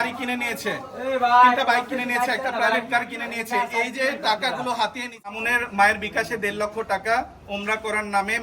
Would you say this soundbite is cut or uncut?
cut